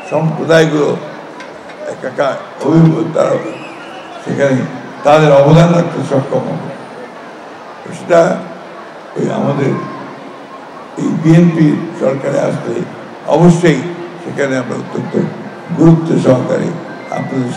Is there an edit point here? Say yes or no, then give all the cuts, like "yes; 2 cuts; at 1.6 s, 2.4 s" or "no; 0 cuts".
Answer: no; 0 cuts